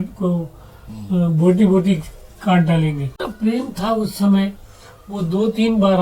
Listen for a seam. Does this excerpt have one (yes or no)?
no